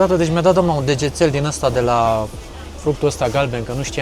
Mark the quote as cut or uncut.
uncut